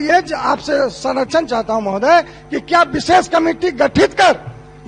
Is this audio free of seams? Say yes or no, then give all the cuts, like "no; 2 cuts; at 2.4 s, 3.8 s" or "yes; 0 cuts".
yes; 0 cuts